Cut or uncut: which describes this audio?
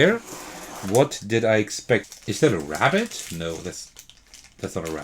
cut